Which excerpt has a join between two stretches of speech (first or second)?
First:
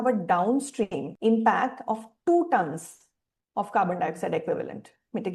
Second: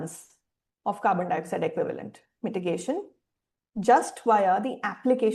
first